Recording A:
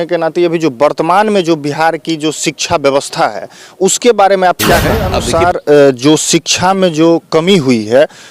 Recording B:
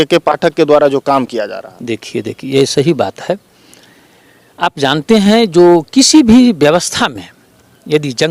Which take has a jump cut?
A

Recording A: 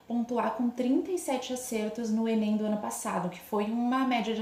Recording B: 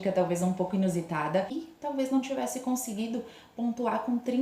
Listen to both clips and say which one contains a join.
B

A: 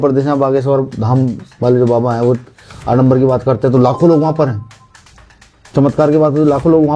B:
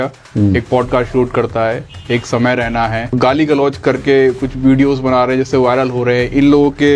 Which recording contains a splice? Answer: B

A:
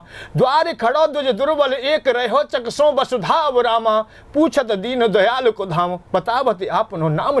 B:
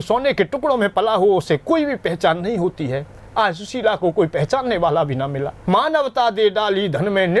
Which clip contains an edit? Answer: B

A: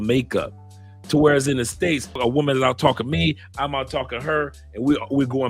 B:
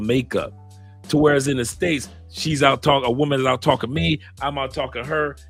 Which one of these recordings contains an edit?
A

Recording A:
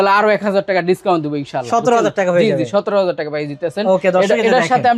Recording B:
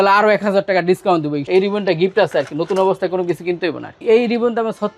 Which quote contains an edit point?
B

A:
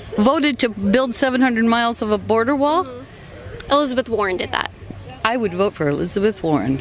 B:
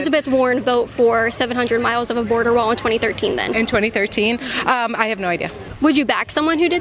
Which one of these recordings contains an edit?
B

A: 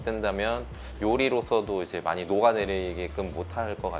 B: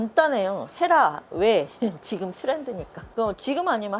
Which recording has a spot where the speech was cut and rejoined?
B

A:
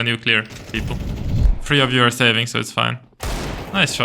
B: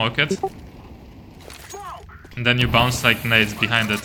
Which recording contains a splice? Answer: A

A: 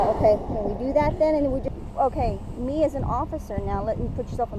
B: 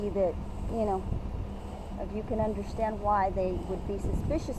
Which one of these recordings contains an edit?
A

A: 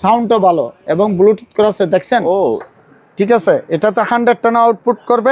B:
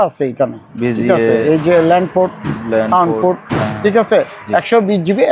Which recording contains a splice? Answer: A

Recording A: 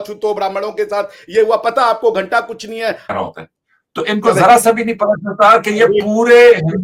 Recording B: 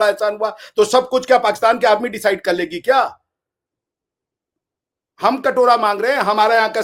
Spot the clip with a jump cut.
A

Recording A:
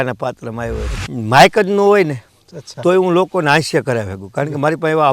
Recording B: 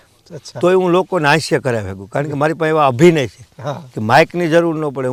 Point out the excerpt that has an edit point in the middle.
A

